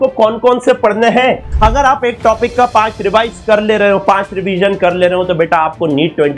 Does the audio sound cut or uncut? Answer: cut